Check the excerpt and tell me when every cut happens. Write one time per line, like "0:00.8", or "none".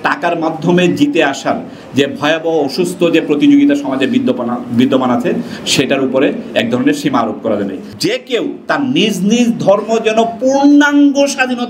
0:07.8